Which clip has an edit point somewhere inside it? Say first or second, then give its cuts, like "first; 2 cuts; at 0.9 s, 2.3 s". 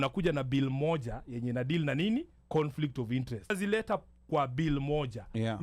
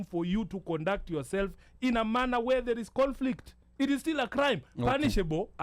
first; 1 cut; at 3.5 s